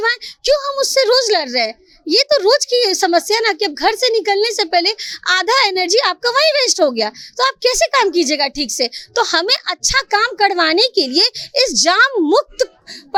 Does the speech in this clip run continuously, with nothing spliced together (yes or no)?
yes